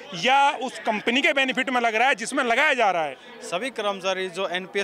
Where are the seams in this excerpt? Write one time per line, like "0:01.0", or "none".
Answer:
0:03.2